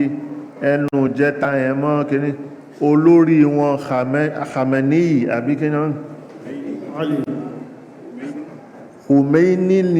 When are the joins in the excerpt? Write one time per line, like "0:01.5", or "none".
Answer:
none